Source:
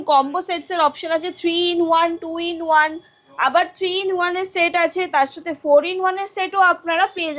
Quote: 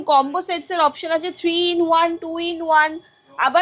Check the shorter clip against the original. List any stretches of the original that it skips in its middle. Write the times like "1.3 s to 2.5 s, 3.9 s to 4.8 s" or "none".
none